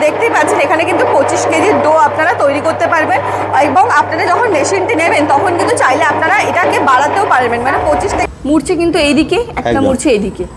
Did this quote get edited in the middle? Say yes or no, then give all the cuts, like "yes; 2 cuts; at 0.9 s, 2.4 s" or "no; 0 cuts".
yes; 1 cut; at 8.3 s